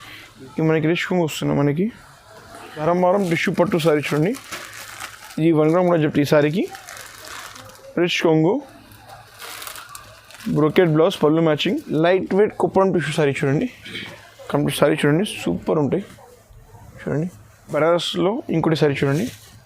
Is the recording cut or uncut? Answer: cut